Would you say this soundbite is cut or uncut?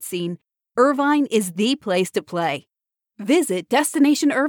uncut